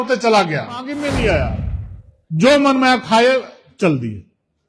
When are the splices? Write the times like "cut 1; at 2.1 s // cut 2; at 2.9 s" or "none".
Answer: cut 1; at 0.9 s